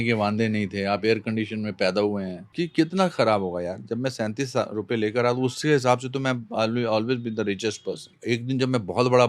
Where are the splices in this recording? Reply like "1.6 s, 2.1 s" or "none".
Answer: 2.5 s, 8.2 s